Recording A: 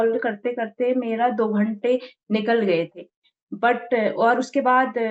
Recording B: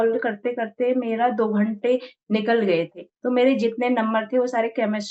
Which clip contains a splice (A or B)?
B